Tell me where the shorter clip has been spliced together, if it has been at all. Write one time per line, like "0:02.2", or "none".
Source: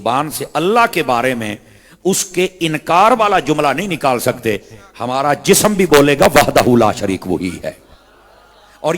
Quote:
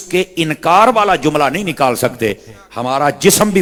none